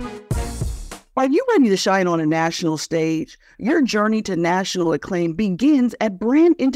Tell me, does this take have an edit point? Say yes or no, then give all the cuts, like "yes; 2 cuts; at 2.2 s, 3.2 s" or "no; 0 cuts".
no; 0 cuts